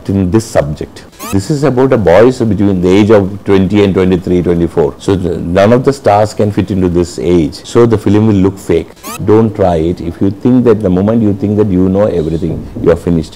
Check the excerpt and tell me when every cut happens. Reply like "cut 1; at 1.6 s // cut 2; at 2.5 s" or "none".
cut 1; at 1.3 s // cut 2; at 5.0 s // cut 3; at 7.6 s // cut 4; at 9.1 s